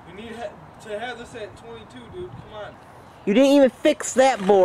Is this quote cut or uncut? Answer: cut